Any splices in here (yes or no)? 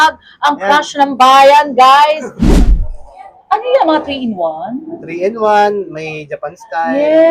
yes